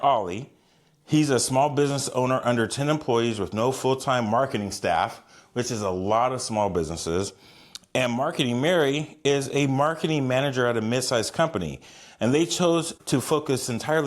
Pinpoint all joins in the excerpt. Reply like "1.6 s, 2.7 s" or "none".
13.0 s